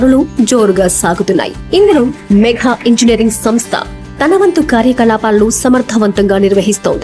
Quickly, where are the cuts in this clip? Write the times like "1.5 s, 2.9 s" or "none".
none